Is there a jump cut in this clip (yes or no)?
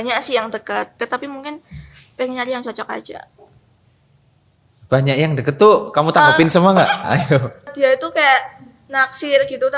yes